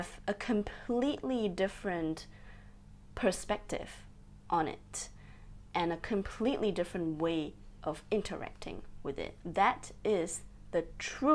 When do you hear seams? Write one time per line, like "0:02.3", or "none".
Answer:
none